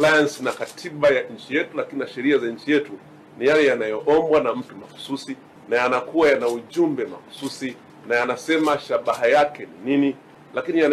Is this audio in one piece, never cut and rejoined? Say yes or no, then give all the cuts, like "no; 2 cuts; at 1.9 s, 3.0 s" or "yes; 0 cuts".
yes; 0 cuts